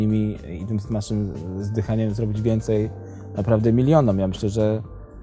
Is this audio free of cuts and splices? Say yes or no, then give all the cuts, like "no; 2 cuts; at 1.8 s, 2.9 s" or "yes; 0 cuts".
yes; 0 cuts